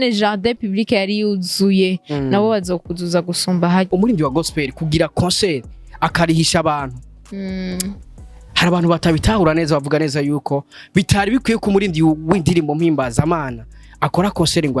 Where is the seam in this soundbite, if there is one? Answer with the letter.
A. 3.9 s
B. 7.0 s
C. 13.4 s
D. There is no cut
A